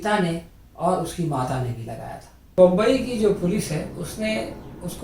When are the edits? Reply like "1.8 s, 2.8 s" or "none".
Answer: 2.6 s